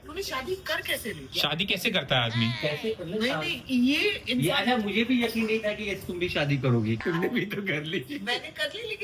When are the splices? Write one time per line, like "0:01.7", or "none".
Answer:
0:07.0